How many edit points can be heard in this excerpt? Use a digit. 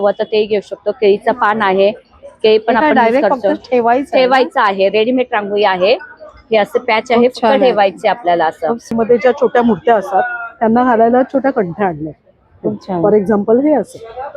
1